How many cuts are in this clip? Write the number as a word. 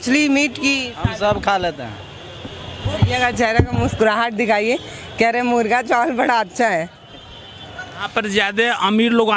two